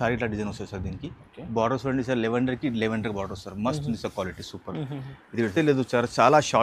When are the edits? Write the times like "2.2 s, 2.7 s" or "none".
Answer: 5.5 s